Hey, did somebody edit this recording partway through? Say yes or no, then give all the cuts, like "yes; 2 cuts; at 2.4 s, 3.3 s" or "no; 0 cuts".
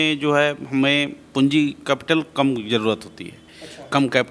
no; 0 cuts